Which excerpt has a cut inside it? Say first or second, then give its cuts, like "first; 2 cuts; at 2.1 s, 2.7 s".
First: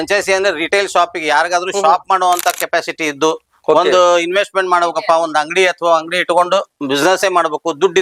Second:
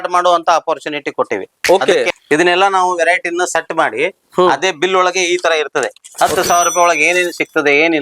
second; 1 cut; at 2.1 s